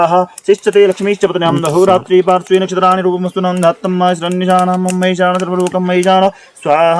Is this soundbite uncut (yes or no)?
yes